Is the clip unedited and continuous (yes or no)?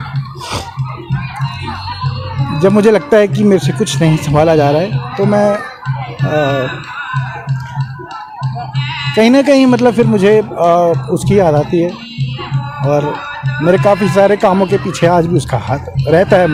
yes